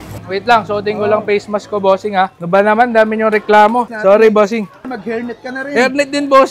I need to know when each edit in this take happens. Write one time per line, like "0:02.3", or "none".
0:03.9
0:04.8